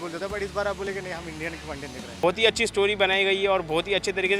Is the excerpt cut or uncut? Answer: cut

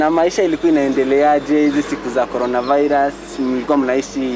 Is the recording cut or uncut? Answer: uncut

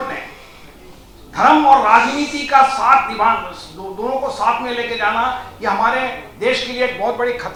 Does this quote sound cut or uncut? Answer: uncut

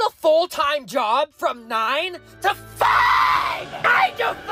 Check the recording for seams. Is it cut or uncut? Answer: uncut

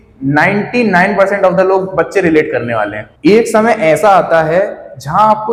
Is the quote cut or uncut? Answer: uncut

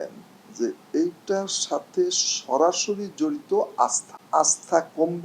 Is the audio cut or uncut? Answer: cut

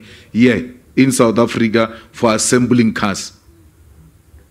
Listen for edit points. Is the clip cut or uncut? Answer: uncut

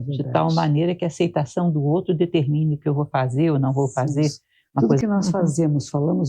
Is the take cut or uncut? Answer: cut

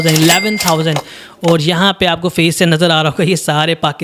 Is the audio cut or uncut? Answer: uncut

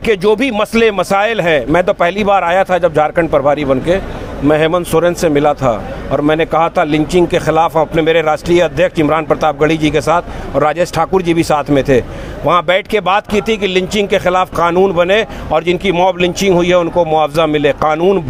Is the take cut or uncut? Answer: uncut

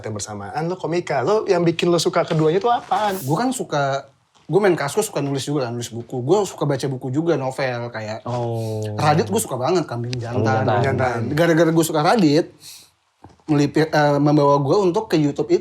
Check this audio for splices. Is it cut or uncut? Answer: cut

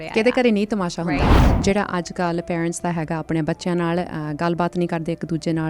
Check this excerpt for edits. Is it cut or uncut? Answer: cut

